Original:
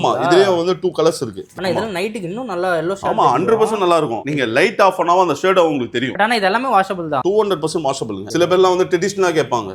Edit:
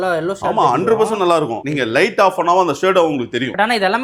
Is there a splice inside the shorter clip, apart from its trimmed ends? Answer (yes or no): no